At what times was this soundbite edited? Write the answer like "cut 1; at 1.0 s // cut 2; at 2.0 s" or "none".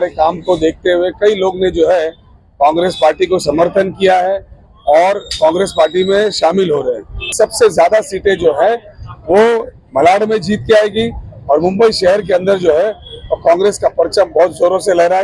cut 1; at 7.3 s